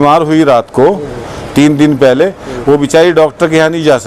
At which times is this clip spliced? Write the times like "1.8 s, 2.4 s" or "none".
none